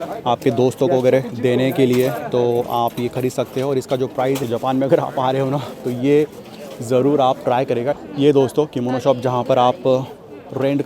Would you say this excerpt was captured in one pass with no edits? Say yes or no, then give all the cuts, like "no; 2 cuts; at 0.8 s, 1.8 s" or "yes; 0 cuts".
no; 2 cuts; at 4.4 s, 7.9 s